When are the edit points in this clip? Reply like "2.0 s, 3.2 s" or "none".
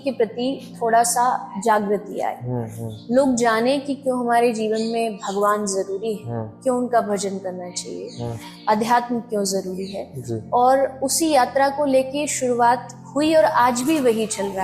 none